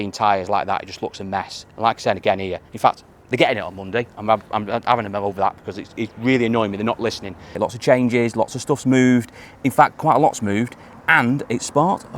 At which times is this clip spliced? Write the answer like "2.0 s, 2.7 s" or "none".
7.6 s